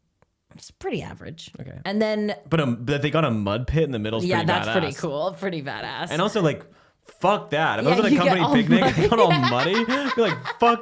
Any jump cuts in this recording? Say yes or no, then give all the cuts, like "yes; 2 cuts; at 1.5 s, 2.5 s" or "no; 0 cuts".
no; 0 cuts